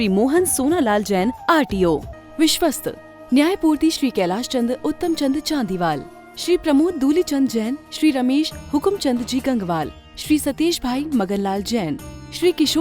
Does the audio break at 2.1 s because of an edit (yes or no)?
yes